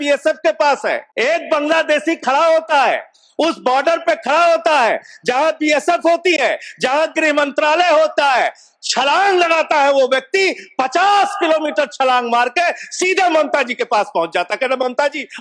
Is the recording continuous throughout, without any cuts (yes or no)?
no